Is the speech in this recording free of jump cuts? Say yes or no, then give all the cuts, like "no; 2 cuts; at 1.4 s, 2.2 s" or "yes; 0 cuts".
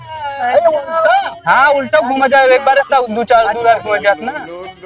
yes; 0 cuts